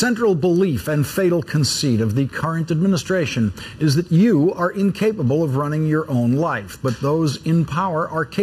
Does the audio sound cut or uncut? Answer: cut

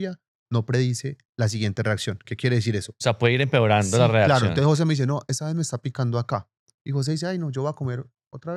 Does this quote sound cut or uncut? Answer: uncut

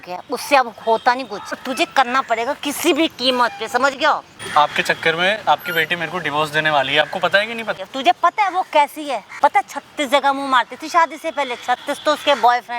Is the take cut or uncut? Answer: cut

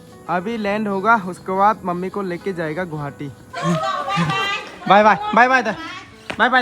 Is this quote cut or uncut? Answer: cut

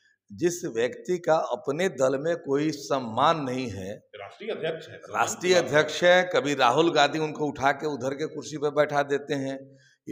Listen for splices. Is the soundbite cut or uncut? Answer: uncut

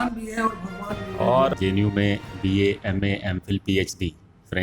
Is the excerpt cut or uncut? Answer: cut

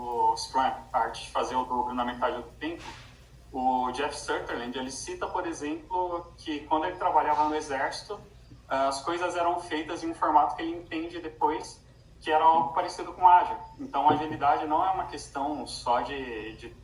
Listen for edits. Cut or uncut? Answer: uncut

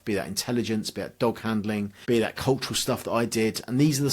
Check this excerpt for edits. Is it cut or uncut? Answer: cut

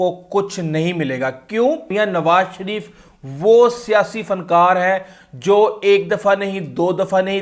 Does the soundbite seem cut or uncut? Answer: cut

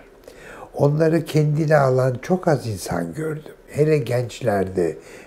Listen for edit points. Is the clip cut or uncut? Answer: uncut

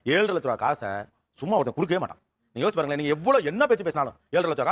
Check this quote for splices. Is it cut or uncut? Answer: uncut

